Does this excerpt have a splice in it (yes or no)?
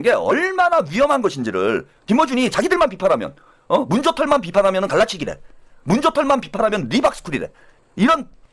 yes